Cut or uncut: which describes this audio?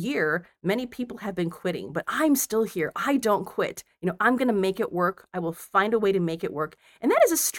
uncut